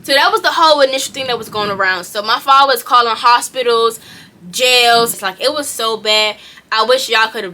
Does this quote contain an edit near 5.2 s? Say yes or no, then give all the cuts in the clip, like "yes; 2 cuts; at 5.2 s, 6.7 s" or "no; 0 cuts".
yes; 1 cut; at 5.2 s